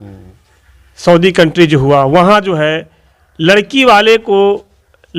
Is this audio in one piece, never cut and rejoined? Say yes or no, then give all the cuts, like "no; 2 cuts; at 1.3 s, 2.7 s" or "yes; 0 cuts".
yes; 0 cuts